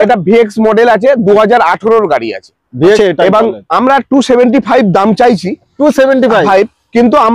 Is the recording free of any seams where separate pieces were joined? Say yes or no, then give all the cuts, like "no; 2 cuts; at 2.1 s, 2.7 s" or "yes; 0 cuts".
no; 1 cut; at 3.0 s